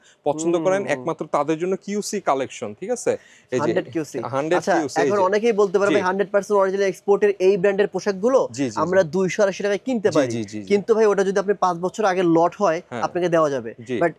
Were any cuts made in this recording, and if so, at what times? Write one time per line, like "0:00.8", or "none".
none